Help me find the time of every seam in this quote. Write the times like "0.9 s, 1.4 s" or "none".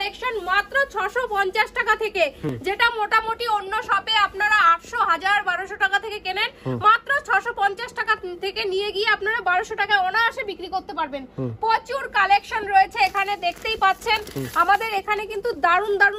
none

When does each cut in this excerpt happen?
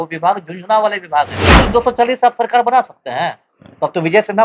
1.5 s

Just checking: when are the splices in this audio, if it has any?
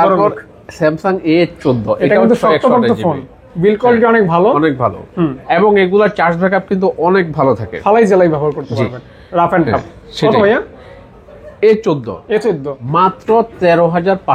none

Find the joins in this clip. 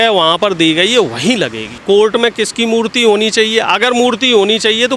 1.7 s

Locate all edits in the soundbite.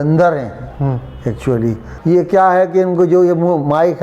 1.9 s

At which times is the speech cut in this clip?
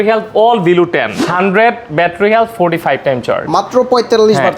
1.1 s

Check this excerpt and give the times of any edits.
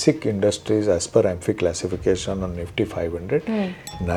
none

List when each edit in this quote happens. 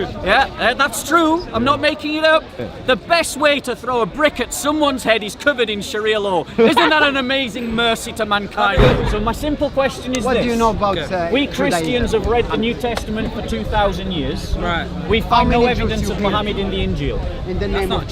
2.6 s, 9.0 s

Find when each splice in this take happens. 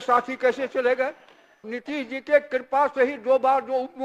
1.7 s

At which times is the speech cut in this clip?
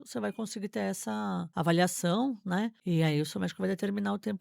1.5 s, 2.8 s

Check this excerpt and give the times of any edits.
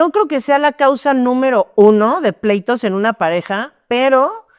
none

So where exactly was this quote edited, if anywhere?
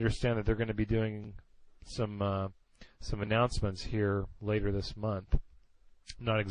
none

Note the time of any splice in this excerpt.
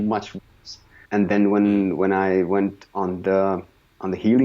1.0 s

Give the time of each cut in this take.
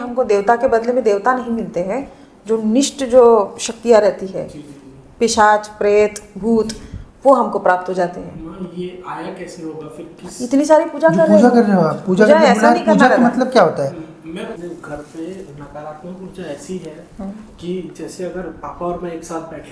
14.5 s

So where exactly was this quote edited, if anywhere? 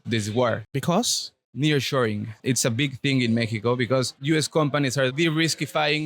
2.3 s, 4.2 s, 5.1 s

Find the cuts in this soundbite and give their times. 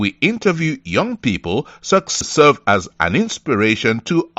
2.1 s

